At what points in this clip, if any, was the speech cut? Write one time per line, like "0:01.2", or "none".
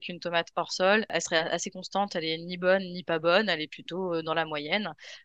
0:01.1